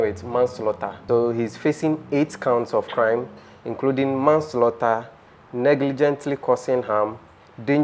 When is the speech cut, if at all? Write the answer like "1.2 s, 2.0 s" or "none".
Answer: 1.0 s